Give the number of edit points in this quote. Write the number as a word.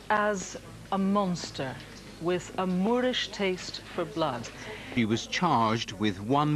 one